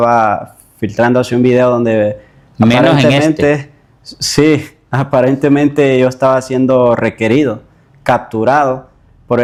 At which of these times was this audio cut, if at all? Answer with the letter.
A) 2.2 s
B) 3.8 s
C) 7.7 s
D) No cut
D